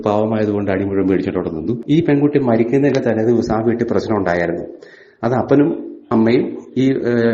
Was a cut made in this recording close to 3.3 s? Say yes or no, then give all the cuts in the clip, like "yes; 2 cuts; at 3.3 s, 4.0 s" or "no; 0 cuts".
no; 1 cut; at 1.7 s